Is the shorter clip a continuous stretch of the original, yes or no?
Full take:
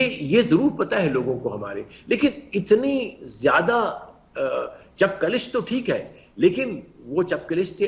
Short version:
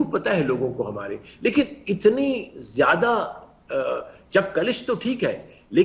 yes